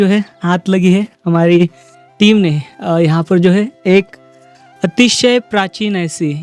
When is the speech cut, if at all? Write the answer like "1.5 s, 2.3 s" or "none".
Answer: none